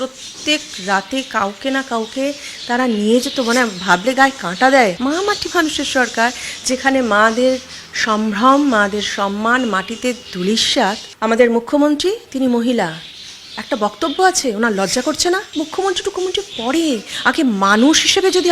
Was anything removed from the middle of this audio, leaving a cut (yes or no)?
yes